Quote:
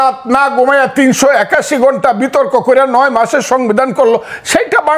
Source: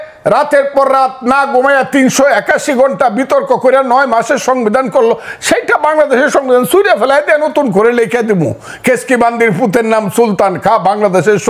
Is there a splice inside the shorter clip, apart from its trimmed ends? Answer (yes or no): no